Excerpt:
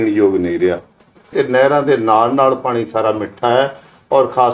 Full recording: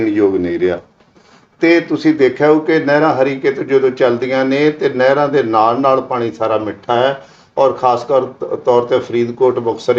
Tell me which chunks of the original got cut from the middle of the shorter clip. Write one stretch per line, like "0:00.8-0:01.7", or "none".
0:01.3-0:04.8